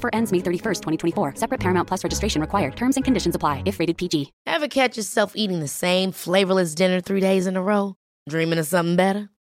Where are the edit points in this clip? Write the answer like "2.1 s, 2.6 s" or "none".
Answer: 4.4 s